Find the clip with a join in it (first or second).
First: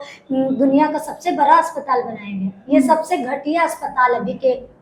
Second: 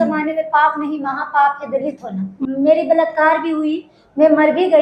second